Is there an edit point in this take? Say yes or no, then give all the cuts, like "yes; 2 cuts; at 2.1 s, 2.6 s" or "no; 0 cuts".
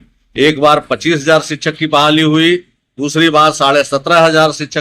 no; 0 cuts